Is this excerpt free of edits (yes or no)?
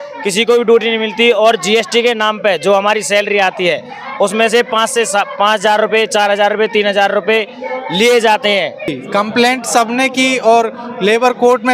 no